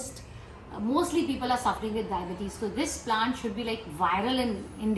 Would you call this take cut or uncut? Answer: uncut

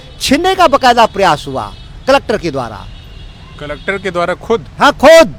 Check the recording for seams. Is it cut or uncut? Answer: uncut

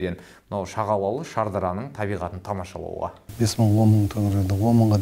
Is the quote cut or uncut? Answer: cut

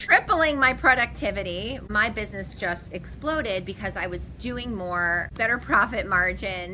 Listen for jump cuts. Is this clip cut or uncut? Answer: cut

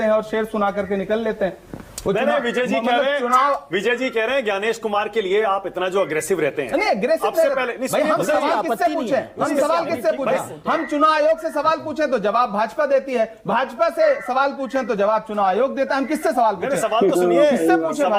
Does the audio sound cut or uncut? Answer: uncut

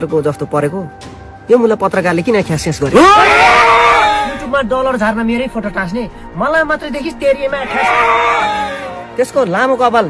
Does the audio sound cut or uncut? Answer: uncut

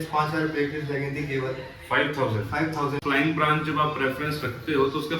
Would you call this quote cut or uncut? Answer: cut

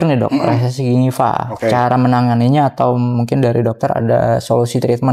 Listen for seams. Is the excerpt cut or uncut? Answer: uncut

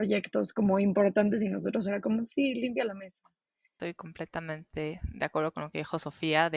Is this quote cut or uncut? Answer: cut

